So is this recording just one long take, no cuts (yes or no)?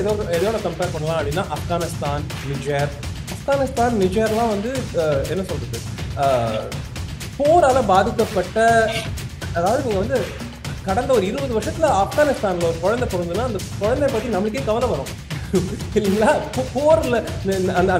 yes